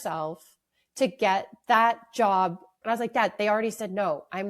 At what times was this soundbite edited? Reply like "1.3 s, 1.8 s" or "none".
2.7 s